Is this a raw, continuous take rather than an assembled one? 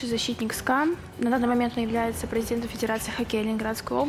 no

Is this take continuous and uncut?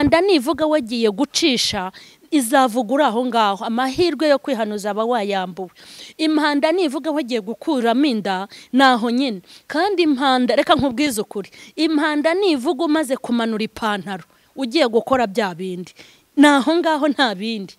yes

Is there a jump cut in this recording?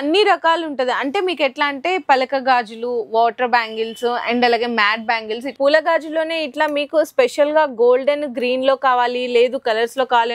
yes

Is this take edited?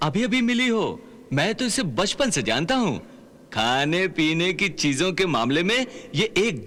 no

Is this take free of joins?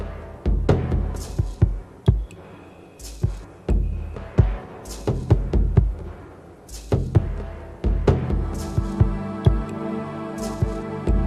yes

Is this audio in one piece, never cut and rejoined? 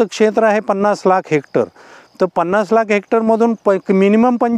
yes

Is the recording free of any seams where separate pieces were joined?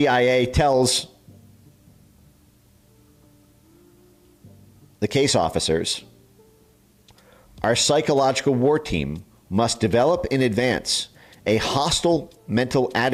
yes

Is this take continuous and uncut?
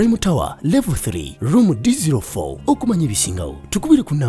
yes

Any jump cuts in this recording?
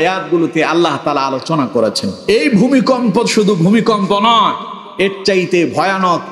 yes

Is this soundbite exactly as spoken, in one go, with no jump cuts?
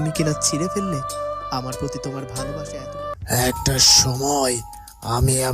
no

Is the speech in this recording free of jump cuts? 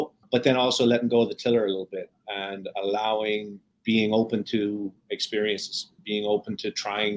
no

